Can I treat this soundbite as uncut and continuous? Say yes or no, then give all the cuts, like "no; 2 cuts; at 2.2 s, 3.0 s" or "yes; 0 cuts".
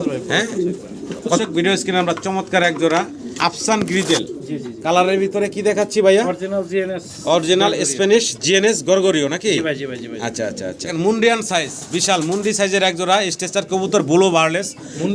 no; 2 cuts; at 1.4 s, 10.8 s